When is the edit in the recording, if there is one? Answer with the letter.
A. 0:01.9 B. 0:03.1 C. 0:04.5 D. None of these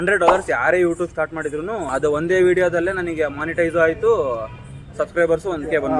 A